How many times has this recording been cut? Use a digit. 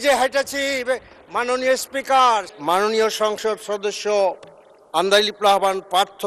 1